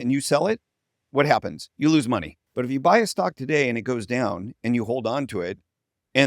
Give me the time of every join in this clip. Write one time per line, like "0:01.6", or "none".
0:02.4